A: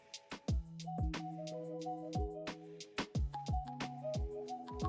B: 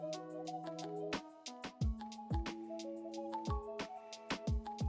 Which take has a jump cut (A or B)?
A